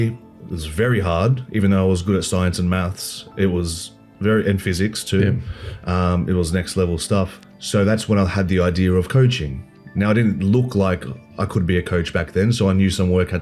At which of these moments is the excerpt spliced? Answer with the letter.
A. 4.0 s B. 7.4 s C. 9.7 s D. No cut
B